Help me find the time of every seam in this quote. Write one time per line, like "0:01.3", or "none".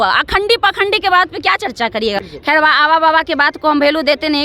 0:02.2